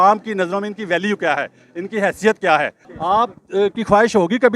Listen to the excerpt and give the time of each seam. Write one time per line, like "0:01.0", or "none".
0:02.8